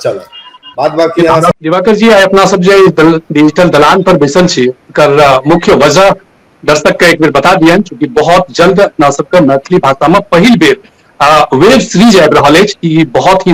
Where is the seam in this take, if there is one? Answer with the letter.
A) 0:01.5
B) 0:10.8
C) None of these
A